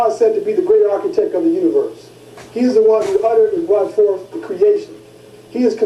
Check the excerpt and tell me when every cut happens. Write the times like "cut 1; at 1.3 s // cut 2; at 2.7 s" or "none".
cut 1; at 3.2 s